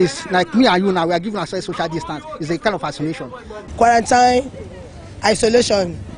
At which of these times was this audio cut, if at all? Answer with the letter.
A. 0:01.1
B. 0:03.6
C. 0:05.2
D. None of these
B